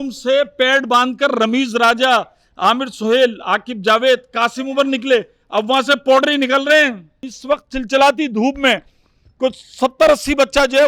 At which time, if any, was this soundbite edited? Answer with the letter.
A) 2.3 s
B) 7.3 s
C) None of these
B